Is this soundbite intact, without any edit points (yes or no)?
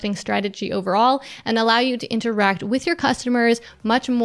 yes